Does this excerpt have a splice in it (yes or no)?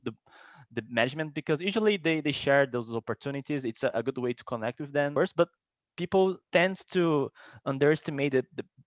yes